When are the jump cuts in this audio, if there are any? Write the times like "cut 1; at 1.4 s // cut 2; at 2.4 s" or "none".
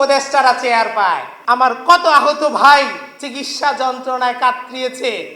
cut 1; at 1.3 s